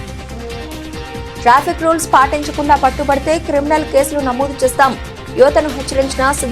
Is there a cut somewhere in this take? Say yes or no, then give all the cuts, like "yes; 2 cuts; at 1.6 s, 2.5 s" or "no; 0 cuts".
yes; 1 cut; at 0.9 s